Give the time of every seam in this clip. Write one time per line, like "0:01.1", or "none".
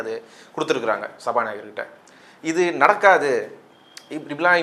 none